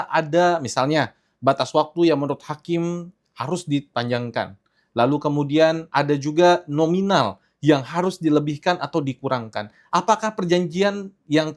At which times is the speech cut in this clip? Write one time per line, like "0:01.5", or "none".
none